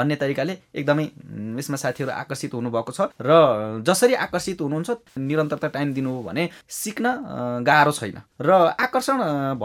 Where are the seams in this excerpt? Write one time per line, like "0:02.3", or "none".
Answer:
none

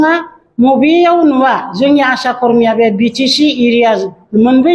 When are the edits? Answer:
none

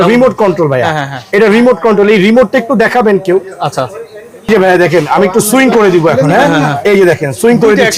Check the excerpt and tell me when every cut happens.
none

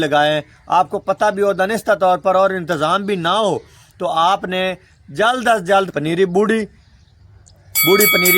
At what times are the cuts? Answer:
0:05.9

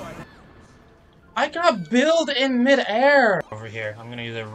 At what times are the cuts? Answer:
0:03.5

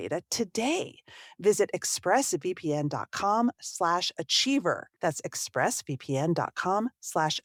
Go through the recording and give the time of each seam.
none

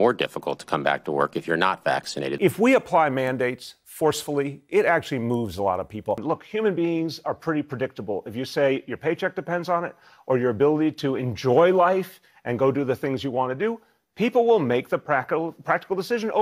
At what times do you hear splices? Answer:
none

